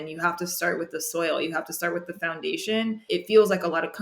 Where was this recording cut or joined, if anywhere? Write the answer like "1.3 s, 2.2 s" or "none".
3.0 s